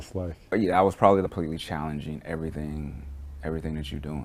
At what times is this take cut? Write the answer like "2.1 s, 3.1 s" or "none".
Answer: none